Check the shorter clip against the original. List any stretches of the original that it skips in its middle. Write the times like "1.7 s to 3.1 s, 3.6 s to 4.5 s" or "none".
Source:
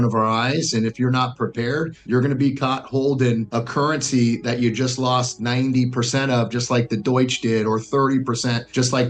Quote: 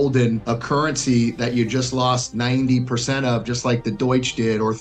none